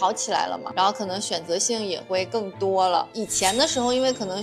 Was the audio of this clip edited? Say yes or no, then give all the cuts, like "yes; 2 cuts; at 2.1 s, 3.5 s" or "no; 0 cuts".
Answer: no; 0 cuts